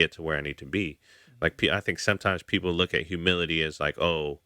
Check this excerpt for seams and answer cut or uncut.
uncut